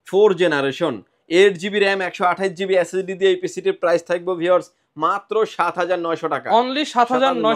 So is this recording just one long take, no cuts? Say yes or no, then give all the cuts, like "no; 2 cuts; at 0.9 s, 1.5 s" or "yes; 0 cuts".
yes; 0 cuts